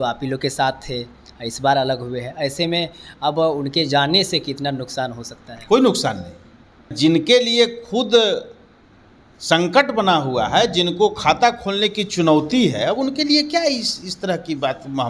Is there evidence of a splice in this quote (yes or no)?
yes